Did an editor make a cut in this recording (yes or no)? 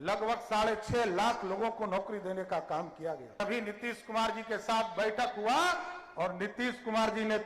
yes